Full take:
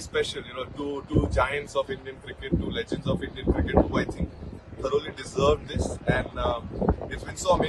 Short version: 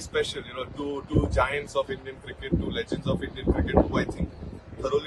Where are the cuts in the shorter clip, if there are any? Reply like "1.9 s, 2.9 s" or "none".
none